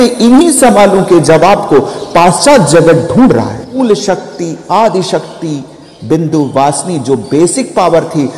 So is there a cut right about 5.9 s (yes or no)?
no